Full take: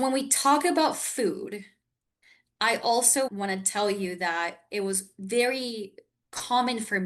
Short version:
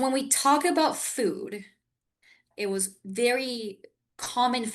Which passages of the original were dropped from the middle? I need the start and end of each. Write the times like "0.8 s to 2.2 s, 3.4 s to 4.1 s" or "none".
2.5 s to 4.6 s